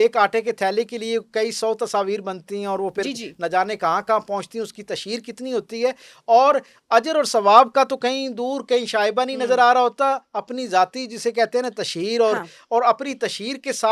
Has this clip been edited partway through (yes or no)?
no